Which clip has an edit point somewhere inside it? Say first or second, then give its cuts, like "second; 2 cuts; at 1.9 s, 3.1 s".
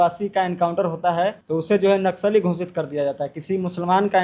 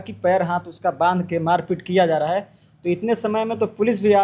first; 1 cut; at 1.4 s